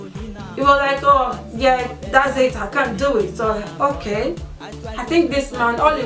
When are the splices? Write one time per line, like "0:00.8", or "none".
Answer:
none